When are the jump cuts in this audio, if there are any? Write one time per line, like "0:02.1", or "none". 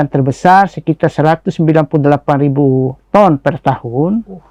none